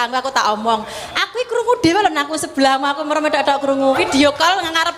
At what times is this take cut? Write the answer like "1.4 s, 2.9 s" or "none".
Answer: 4.0 s